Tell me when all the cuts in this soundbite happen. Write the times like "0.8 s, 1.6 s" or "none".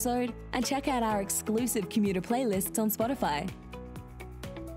none